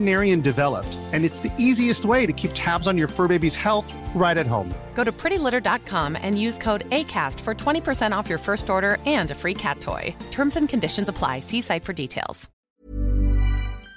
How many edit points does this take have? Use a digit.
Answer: 1